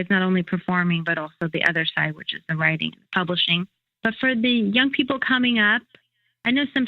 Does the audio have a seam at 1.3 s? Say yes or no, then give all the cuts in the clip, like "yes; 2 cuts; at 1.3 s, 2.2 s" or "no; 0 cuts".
no; 1 cut; at 3.8 s